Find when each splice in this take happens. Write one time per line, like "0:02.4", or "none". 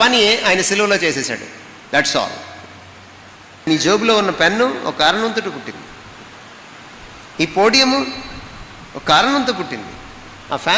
0:03.7